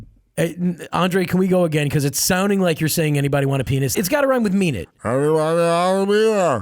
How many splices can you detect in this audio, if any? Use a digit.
1